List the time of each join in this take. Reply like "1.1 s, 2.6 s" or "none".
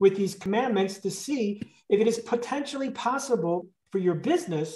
3.6 s